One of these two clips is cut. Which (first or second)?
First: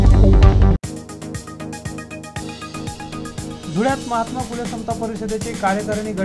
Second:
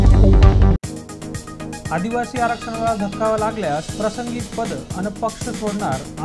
second